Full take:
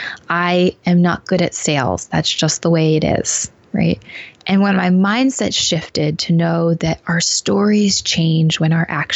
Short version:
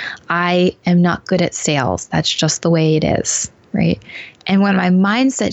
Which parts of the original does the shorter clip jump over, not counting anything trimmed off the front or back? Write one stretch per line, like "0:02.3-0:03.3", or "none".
none